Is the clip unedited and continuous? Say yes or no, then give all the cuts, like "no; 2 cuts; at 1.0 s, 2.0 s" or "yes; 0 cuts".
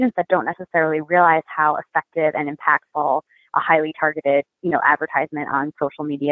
yes; 0 cuts